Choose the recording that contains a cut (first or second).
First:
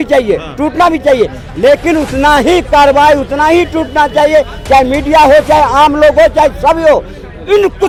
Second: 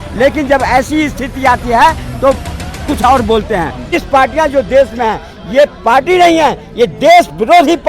second